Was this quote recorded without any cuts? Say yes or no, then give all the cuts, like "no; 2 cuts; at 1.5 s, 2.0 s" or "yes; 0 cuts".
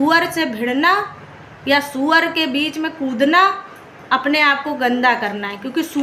yes; 0 cuts